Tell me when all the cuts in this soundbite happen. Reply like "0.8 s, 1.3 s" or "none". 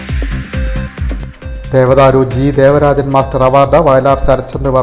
1.3 s

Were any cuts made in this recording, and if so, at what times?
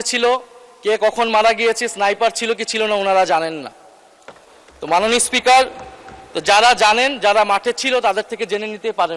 none

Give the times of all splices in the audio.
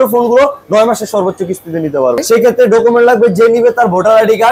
2.2 s

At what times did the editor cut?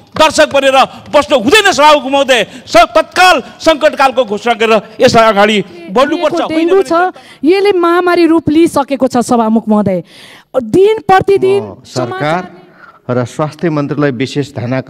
6.4 s, 11.8 s

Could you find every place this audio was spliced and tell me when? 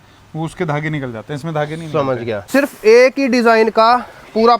2.3 s

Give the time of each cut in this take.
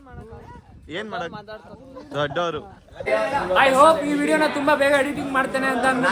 3.1 s

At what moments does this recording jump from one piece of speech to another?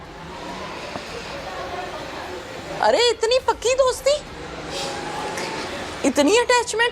none

